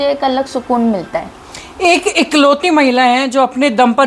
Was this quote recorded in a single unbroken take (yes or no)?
yes